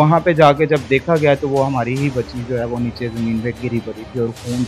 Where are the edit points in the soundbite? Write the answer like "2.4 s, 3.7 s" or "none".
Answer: none